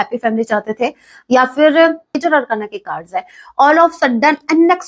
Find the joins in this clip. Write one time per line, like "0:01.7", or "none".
0:02.1